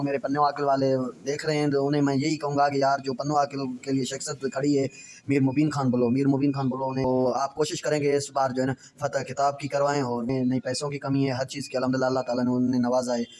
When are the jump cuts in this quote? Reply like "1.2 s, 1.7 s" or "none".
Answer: 7.0 s, 10.3 s